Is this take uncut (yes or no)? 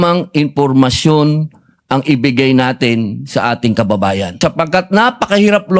no